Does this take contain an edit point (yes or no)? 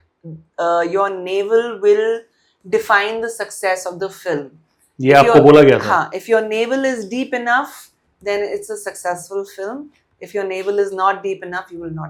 no